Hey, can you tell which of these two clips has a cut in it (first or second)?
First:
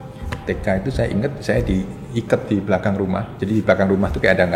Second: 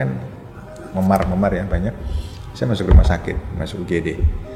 first